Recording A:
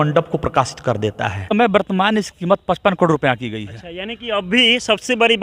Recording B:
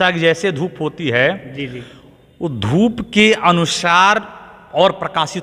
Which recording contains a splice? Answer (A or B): A